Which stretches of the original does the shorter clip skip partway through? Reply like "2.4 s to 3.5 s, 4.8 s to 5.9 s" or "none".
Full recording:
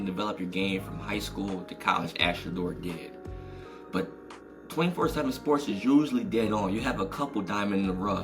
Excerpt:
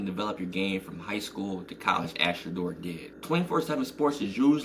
3.1 s to 4.6 s